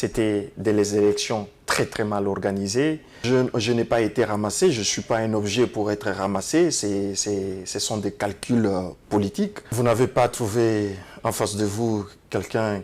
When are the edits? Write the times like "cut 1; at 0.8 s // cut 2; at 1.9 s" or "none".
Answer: cut 1; at 3.1 s // cut 2; at 9.6 s